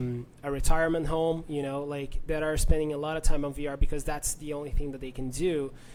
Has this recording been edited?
no; 0 cuts

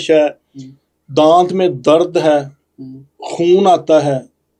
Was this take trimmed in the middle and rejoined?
no; 0 cuts

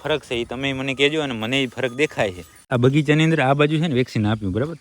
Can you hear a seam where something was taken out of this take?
yes; 1 cut; at 2.7 s

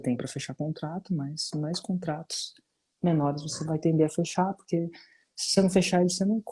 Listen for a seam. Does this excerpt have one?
no; 0 cuts

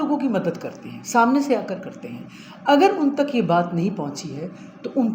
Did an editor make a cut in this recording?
no; 0 cuts

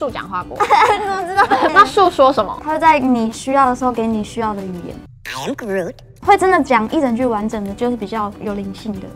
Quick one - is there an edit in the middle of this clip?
yes; 2 cuts; at 1.7 s, 6.1 s

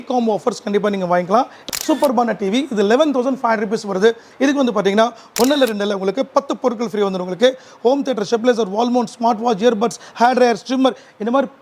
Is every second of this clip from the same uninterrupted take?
no; 1 cut; at 1.6 s

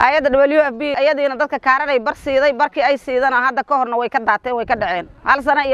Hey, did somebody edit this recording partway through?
yes; 1 cut; at 0.9 s

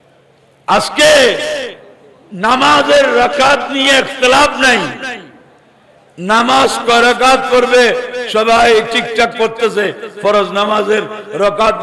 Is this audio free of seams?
yes; 0 cuts

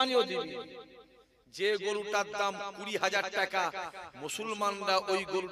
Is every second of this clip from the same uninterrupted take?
yes; 0 cuts

